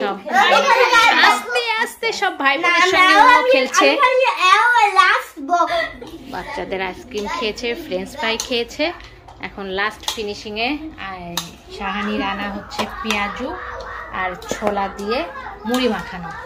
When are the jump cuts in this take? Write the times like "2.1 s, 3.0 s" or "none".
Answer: 5.8 s